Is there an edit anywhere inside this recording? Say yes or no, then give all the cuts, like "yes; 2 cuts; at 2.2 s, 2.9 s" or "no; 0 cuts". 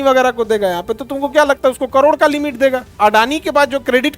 yes; 1 cut; at 2.9 s